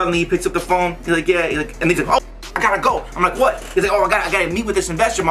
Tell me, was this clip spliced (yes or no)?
no